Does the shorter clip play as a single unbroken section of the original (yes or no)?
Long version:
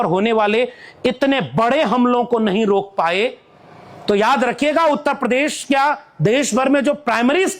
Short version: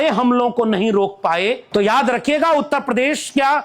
no